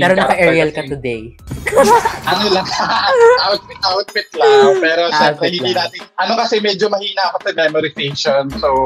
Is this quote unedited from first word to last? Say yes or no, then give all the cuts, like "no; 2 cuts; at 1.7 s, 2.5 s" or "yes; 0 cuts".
yes; 0 cuts